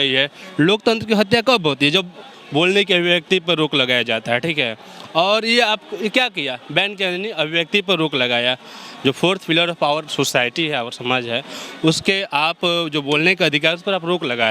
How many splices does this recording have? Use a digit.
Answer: 0